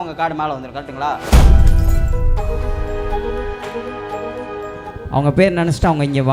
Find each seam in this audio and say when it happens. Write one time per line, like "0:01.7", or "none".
0:04.9